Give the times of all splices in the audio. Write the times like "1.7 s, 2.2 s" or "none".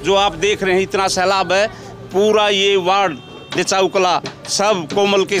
none